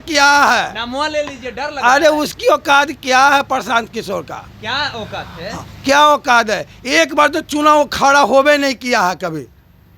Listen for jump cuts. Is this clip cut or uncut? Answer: uncut